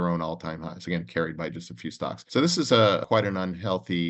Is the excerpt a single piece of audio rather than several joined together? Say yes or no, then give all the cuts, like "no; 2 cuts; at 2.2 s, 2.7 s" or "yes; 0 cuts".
no; 2 cuts; at 2.2 s, 3.0 s